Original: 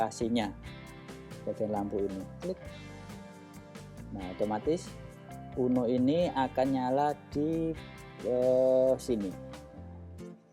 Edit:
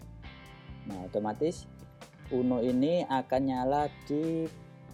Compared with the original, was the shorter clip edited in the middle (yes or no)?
no